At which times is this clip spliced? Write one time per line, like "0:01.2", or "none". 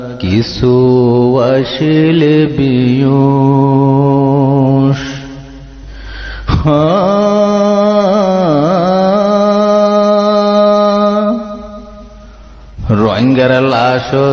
none